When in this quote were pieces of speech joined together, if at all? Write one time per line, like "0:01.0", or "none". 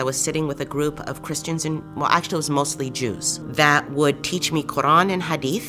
none